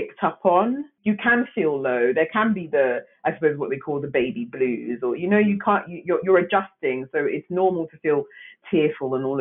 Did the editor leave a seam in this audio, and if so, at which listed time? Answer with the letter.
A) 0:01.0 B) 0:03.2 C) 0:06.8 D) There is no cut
A